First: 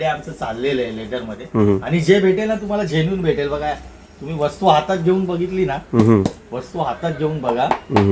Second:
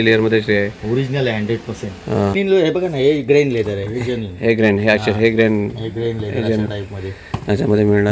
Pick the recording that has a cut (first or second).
second